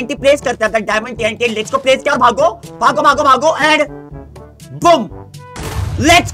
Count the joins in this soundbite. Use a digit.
0